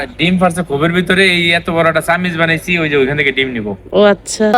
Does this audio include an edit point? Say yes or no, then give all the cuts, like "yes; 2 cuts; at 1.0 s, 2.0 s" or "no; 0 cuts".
no; 0 cuts